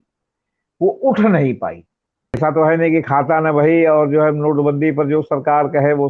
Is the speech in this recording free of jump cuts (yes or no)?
no